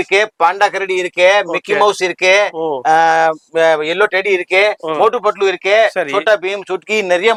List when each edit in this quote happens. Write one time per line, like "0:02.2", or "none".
none